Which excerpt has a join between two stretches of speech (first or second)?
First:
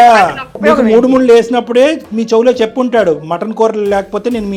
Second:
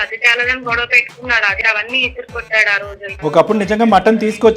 second